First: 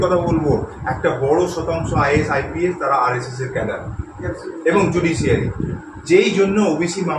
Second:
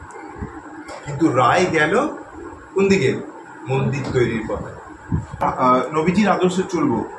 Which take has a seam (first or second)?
second